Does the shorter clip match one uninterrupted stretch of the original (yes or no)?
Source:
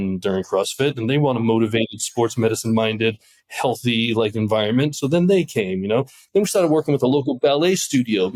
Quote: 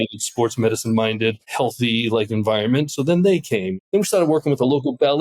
no